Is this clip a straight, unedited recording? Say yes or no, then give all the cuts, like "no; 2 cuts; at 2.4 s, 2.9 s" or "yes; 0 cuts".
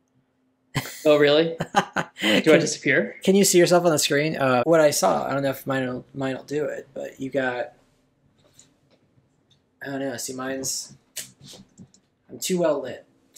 no; 1 cut; at 4.6 s